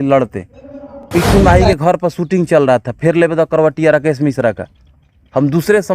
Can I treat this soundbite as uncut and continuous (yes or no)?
no